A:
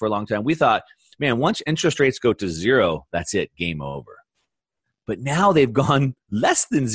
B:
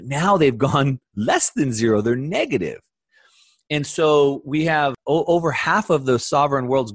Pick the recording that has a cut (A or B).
B